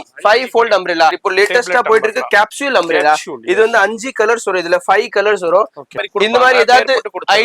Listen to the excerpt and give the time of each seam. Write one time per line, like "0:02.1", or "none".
0:01.2
0:05.9